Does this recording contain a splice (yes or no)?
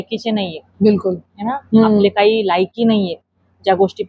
no